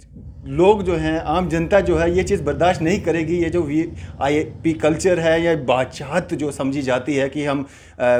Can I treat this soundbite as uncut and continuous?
yes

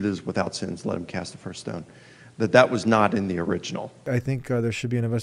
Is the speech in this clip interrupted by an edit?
yes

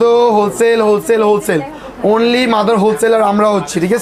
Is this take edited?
no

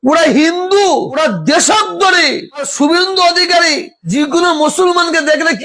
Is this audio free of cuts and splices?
yes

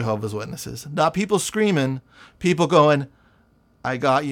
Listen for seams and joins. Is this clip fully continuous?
yes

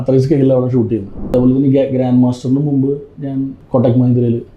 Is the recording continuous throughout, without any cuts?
no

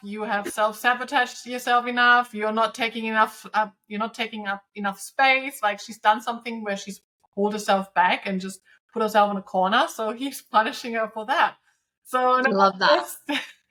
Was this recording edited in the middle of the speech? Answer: no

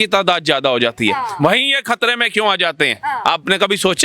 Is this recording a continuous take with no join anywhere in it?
yes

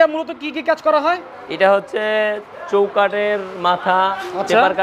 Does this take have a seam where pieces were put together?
no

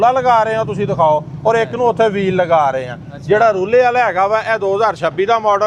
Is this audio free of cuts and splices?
yes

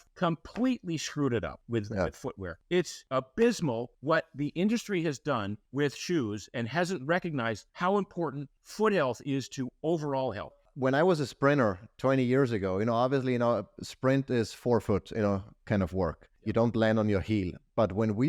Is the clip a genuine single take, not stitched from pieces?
no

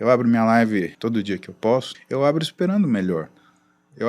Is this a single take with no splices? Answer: no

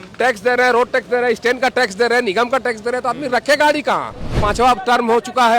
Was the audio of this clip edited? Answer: yes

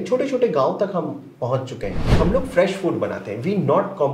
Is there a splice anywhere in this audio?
yes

